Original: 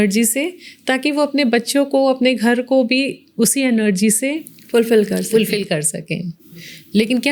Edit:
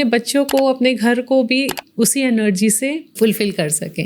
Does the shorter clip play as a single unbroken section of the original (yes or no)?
no